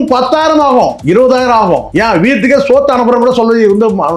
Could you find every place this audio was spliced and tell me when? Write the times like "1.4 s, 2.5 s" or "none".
1.0 s, 1.9 s